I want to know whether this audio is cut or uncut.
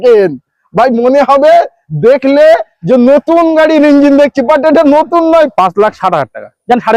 cut